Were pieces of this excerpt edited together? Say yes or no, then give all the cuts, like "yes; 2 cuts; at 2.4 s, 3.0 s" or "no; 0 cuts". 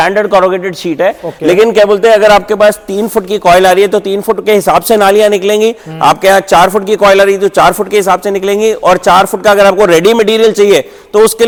no; 0 cuts